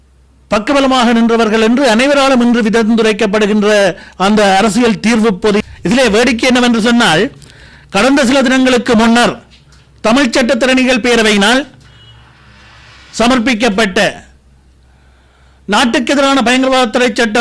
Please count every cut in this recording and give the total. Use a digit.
1